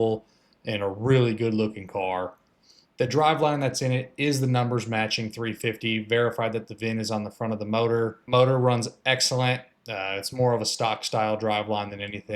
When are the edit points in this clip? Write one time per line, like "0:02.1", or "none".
0:08.2